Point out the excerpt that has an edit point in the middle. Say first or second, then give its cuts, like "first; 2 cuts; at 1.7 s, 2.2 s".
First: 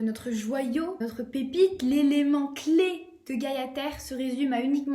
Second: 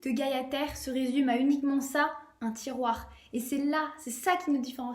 first; 1 cut; at 1.0 s